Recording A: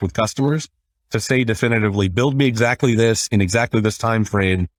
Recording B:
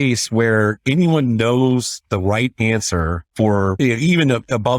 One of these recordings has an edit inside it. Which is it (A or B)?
B